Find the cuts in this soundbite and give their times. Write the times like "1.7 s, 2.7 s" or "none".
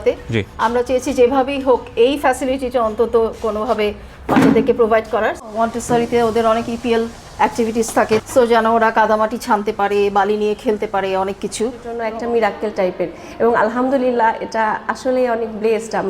5.4 s, 8.2 s, 11.9 s